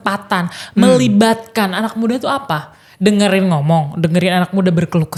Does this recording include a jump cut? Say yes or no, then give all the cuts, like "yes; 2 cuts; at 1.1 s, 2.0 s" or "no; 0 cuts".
no; 0 cuts